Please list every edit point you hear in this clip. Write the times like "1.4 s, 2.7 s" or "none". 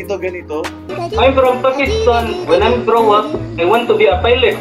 0.9 s